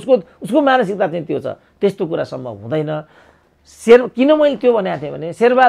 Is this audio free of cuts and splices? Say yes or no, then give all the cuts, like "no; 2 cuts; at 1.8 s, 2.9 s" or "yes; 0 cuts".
yes; 0 cuts